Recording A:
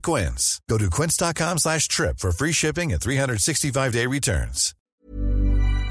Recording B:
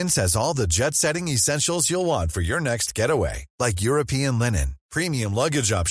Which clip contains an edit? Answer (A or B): A